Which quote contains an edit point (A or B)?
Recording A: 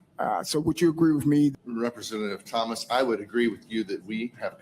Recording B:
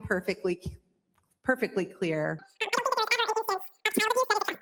A